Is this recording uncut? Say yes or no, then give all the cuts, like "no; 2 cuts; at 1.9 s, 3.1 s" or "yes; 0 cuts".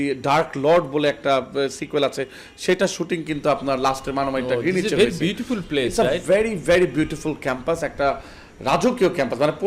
yes; 0 cuts